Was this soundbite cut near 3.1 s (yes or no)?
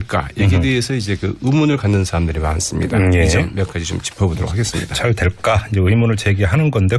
no